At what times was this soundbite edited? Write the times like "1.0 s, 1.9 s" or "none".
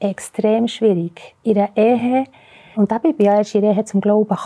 2.7 s